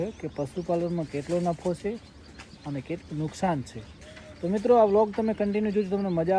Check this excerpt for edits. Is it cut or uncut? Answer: uncut